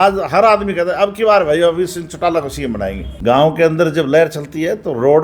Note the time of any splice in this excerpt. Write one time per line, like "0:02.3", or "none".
0:03.1